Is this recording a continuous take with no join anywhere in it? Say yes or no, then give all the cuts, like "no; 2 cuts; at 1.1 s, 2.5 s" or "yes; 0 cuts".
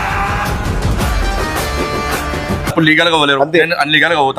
no; 1 cut; at 2.7 s